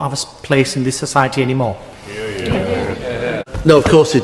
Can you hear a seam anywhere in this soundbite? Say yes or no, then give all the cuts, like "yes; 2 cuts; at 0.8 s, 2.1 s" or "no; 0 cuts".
no; 0 cuts